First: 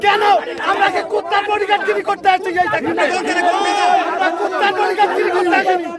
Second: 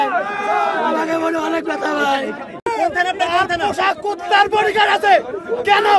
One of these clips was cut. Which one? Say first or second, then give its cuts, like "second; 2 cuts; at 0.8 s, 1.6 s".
second; 1 cut; at 2.6 s